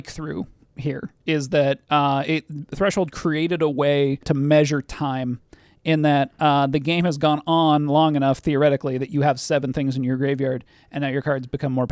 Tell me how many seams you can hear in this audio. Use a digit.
2